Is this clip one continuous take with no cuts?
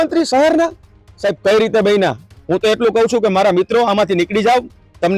no; 1 cut; at 2.3 s

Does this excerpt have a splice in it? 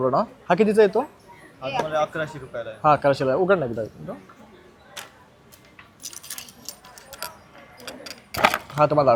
no; 0 cuts

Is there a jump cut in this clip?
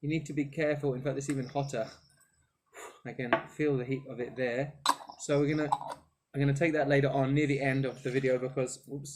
no; 0 cuts

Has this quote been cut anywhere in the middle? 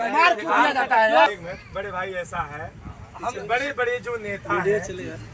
yes; 1 cut; at 1.3 s

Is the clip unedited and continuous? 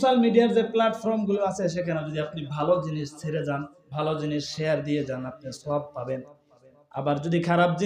no; 1 cut; at 3.8 s

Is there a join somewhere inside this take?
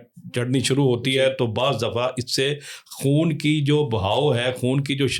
no; 0 cuts

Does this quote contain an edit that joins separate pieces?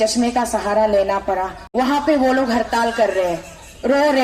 yes; 1 cut; at 1.6 s

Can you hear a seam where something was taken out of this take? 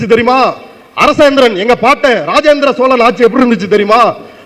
no; 0 cuts

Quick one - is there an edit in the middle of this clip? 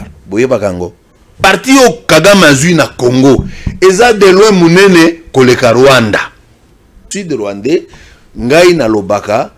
yes; 2 cuts; at 1.4 s, 7.1 s

